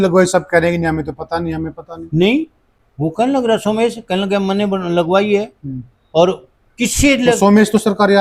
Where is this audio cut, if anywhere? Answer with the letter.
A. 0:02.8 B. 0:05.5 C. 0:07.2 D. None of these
D